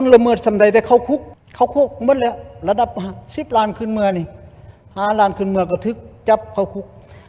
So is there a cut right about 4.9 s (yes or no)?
no